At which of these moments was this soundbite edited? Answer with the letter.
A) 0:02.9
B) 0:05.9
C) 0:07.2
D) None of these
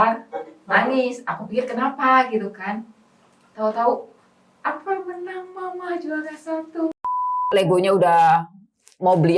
C